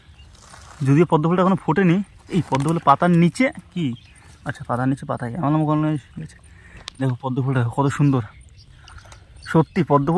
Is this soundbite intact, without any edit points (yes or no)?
yes